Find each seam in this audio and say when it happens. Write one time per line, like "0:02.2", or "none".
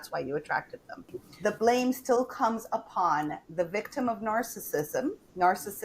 0:01.2